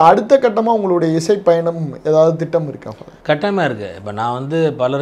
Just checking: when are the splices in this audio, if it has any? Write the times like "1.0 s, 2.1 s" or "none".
none

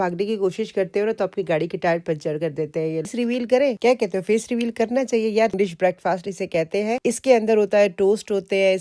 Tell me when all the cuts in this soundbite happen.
3.1 s, 5.5 s

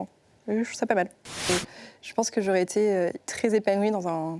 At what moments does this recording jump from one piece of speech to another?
1.4 s

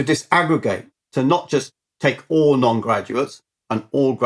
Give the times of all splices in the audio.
1.1 s

